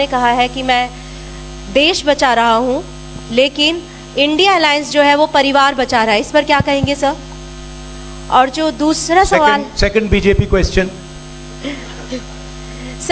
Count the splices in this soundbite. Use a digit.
0